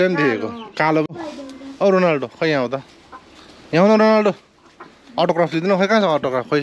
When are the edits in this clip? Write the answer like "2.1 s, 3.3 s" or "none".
1.0 s